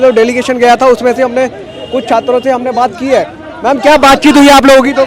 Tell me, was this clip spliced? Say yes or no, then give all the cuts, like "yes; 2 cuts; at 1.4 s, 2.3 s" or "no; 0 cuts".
no; 0 cuts